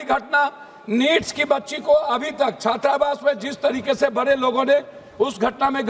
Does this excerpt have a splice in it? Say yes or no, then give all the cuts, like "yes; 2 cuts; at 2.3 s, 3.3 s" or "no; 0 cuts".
no; 0 cuts